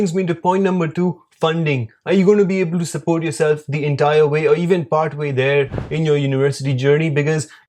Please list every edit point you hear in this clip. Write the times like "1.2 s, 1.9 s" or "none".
none